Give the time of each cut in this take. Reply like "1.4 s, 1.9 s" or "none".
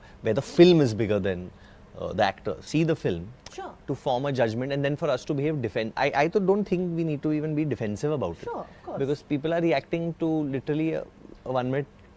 2.6 s